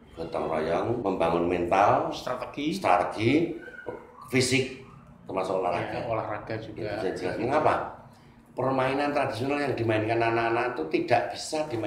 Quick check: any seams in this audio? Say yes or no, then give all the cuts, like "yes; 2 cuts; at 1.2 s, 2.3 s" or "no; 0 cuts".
yes; 1 cut; at 1.0 s